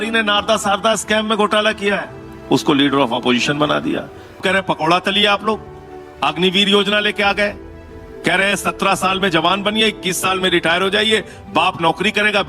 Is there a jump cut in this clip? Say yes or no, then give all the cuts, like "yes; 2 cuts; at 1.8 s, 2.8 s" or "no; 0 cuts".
yes; 2 cuts; at 4.4 s, 7.9 s